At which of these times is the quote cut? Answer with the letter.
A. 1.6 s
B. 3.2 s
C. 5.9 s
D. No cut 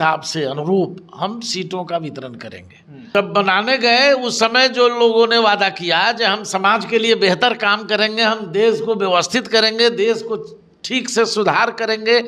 B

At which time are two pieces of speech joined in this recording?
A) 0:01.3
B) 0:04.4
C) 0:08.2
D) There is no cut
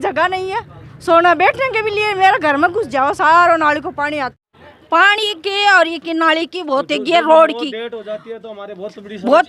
B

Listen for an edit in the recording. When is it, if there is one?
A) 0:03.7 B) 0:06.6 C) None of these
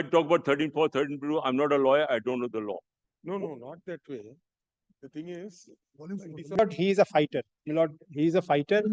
B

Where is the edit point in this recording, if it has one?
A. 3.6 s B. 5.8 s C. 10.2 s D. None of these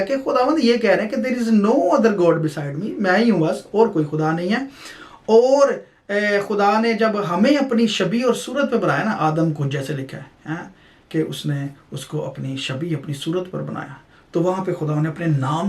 D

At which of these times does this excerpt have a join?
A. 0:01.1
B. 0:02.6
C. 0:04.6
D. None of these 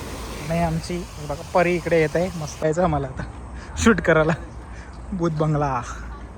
B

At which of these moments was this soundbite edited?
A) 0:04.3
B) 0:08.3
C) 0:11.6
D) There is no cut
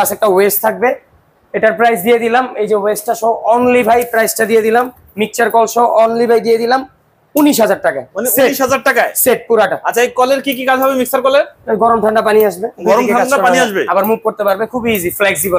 D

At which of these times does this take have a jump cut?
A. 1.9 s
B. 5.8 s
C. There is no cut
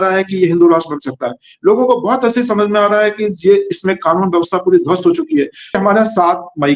B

